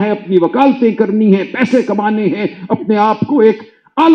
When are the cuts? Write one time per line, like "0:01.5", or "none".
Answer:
none